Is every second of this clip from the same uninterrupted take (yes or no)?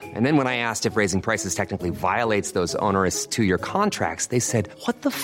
yes